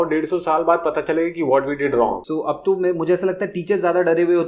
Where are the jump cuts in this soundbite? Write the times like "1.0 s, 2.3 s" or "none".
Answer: 2.2 s